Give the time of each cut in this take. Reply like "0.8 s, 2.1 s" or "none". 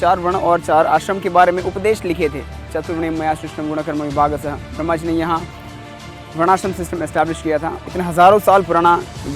7.8 s